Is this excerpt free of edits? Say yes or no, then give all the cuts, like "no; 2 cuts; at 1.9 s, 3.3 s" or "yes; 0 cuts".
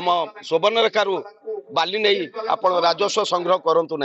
yes; 0 cuts